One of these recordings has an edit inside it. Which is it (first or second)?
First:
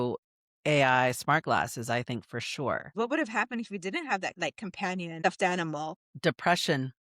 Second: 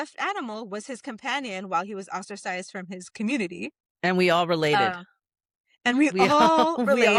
first